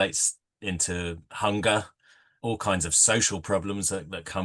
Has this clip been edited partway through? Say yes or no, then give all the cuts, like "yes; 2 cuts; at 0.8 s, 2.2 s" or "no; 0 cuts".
yes; 1 cut; at 2.3 s